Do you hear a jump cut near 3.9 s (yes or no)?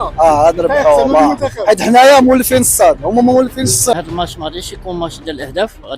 yes